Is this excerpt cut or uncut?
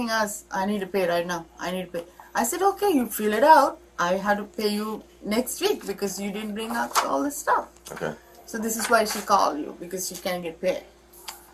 uncut